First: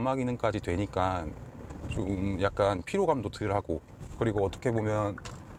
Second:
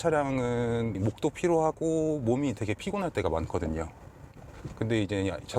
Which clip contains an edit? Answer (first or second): second